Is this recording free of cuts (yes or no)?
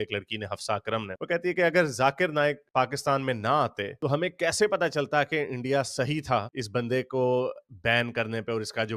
yes